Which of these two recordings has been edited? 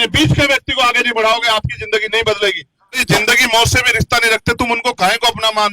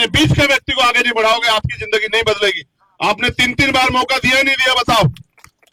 first; 1 cut; at 3.0 s

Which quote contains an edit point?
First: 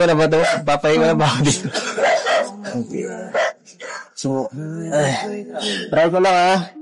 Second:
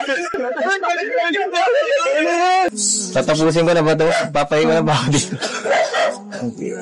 second; 1 cut; at 2.7 s

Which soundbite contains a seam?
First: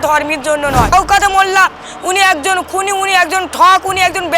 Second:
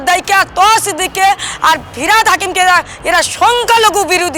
first; 1 cut; at 0.9 s

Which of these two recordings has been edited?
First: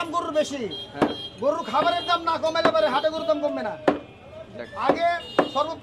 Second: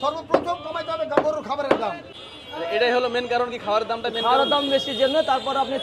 second; 1 cut; at 2.1 s

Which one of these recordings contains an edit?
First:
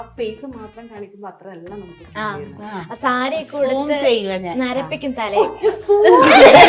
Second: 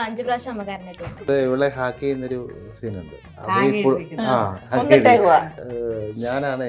second; 4 cuts; at 1.2 s, 3.3 s, 4.6 s, 5.6 s

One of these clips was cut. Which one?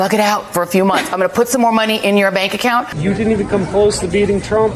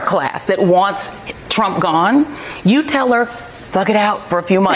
first; 1 cut; at 3.0 s

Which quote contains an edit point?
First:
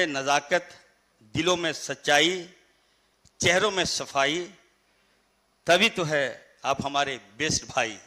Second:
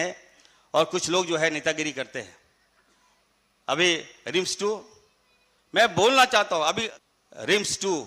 second; 1 cut; at 6.9 s

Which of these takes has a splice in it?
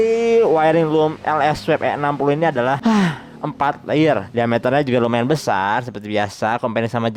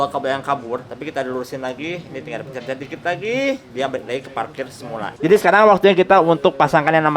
second; 2 cuts; at 0.9 s, 5.2 s

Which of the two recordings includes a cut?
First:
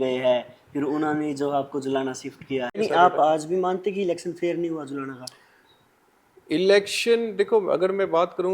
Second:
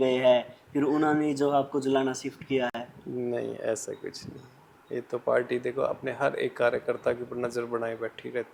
first; 1 cut; at 2.8 s

